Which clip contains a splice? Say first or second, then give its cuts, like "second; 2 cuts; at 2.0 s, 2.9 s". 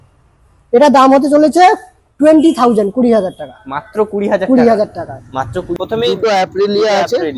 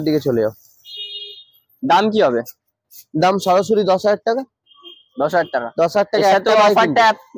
first; 1 cut; at 5.7 s